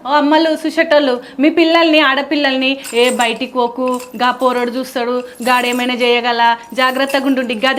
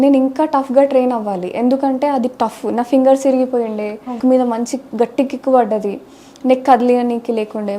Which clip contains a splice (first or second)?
second